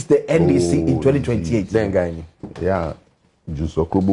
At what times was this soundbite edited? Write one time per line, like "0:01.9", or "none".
none